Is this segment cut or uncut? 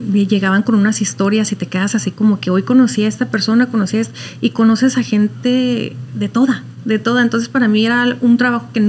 uncut